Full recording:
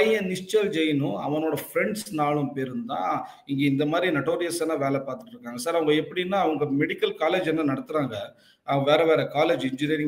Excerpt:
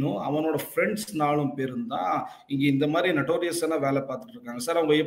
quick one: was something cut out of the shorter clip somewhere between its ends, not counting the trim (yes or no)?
no